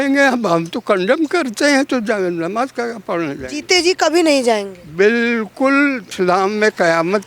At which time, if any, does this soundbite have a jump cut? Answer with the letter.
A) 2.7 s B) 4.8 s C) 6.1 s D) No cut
C